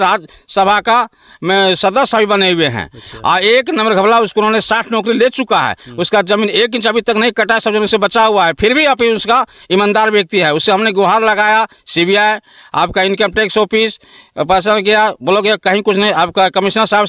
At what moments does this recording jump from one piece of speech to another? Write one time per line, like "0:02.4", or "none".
none